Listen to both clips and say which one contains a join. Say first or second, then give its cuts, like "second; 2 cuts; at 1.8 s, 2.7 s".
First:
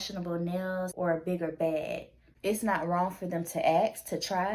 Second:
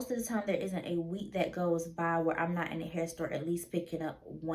first; 2 cuts; at 0.9 s, 2.2 s